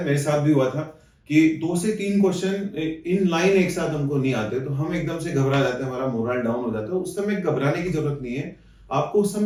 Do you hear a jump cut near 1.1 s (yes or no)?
no